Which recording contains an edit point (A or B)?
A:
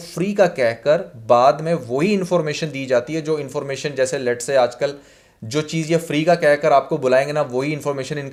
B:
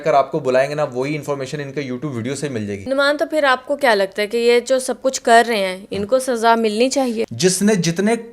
B